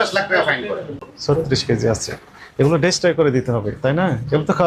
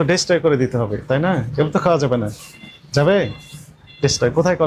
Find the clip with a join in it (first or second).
first